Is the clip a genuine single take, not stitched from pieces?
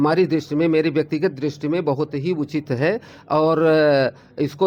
yes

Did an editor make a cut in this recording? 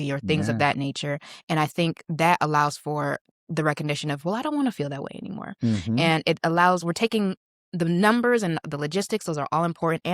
no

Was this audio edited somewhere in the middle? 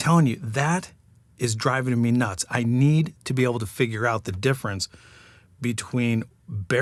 no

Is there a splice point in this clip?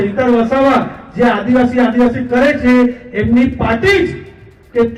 no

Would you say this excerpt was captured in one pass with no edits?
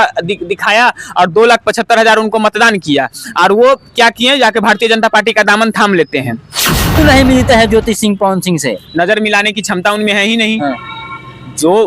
no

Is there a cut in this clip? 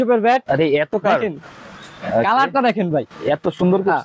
no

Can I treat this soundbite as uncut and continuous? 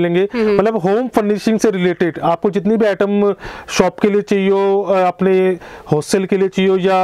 yes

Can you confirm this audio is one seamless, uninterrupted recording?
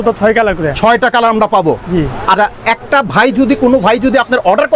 yes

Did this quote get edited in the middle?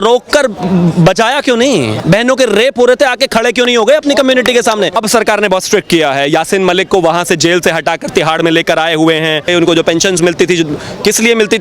yes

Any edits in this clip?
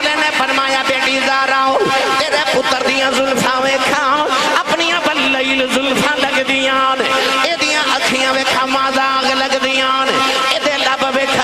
no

